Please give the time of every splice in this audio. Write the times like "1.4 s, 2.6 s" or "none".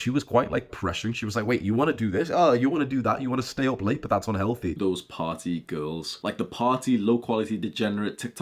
4.8 s

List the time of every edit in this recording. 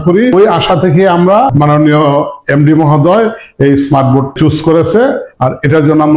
4.3 s

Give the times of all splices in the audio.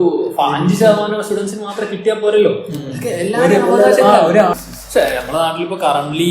4.6 s

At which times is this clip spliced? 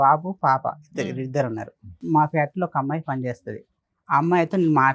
2.0 s

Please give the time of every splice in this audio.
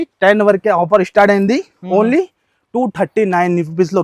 none

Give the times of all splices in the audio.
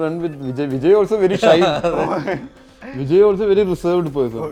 none

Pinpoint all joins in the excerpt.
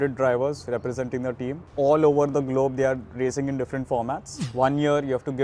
1.6 s, 4.4 s

